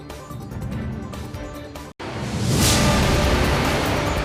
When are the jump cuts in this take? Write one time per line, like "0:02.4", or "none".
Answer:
none